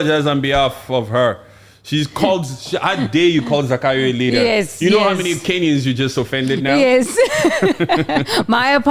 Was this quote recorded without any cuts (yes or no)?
yes